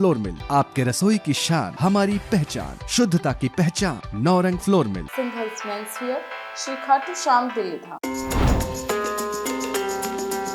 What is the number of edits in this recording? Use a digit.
1